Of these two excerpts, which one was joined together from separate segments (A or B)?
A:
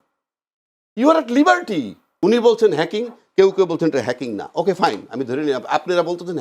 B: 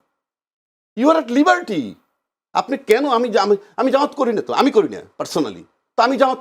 A